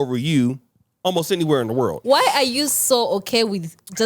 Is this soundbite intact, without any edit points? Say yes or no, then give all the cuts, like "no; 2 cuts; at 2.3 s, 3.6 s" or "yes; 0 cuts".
no; 1 cut; at 2.0 s